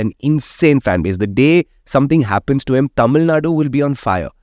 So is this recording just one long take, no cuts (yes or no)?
yes